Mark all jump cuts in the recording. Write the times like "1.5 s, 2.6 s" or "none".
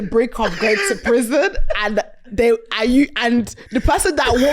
none